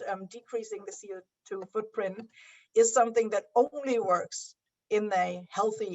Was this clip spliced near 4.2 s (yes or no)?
no